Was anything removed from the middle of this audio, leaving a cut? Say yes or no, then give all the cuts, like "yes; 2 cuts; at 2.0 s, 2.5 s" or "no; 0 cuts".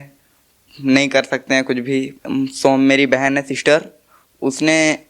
yes; 1 cut; at 2.1 s